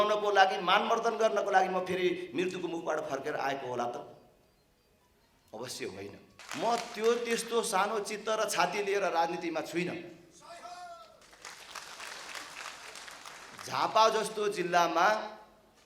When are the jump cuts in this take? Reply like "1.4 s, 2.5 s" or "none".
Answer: 6.4 s